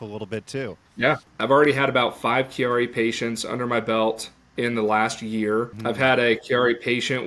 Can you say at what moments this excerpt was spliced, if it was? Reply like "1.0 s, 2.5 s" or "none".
1.1 s, 5.7 s

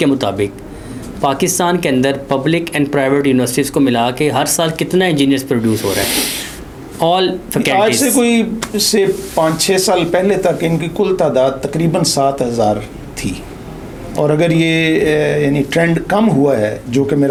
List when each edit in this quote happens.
none

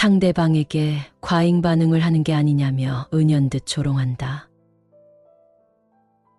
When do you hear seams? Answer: none

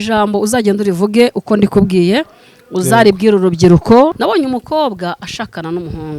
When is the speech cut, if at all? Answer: 4.2 s

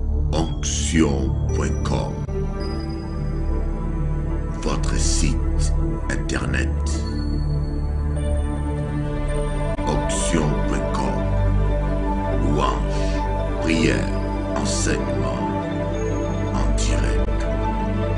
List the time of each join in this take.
none

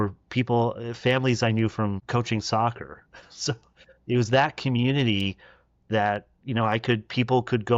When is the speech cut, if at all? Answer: 2.0 s

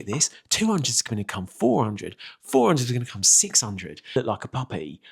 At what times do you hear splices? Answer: 4.2 s

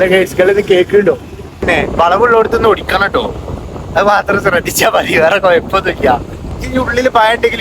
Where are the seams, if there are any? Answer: 1.6 s, 6.6 s

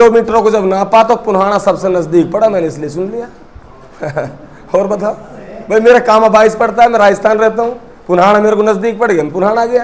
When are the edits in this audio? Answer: none

